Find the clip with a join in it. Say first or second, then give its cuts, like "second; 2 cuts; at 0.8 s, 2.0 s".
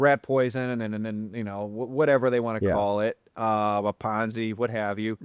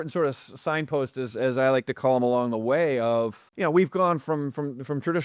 second; 1 cut; at 3.4 s